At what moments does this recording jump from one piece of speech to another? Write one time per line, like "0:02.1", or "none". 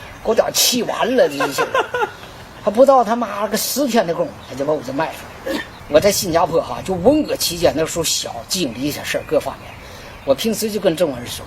0:05.7